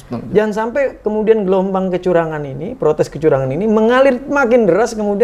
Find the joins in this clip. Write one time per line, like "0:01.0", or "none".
none